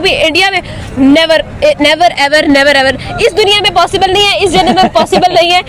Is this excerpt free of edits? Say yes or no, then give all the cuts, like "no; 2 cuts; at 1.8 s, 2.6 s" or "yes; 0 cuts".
yes; 0 cuts